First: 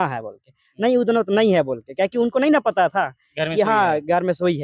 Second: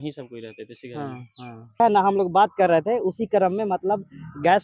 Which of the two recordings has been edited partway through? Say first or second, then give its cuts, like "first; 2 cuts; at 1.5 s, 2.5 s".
second; 1 cut; at 1.8 s